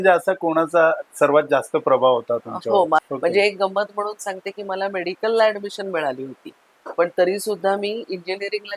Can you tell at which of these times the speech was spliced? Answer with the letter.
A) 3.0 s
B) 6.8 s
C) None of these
A